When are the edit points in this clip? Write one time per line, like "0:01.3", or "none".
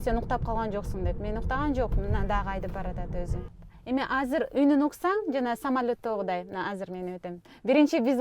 0:03.6